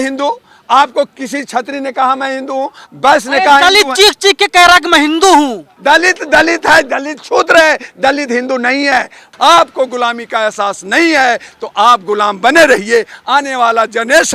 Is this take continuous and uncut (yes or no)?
no